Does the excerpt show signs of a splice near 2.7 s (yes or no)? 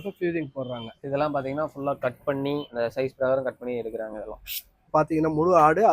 yes